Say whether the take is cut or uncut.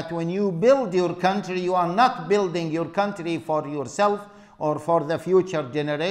uncut